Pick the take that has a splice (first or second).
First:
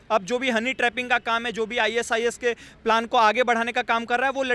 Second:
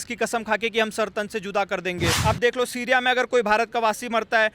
second